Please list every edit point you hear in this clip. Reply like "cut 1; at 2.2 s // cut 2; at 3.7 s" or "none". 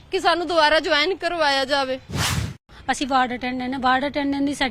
cut 1; at 2.2 s